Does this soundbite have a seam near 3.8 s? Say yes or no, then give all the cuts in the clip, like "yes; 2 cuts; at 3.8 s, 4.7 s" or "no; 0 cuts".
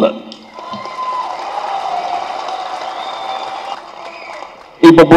yes; 1 cut; at 3.8 s